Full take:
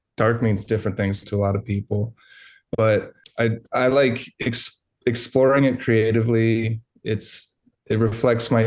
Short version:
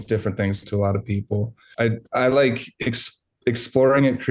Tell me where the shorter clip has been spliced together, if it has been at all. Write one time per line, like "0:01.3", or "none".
0:01.6